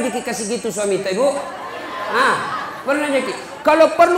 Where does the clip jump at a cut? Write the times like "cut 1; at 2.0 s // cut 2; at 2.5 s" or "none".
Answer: none